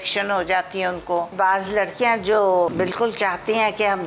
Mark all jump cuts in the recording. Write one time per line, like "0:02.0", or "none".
0:01.3
0:02.7